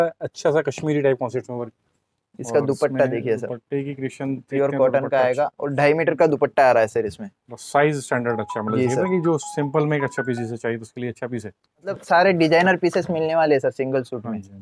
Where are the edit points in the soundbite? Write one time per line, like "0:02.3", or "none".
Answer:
none